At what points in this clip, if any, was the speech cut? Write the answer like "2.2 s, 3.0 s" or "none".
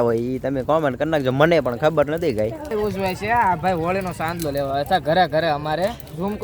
2.7 s